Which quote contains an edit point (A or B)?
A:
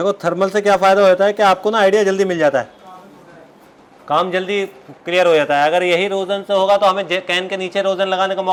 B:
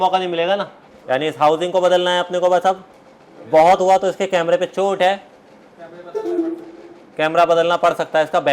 B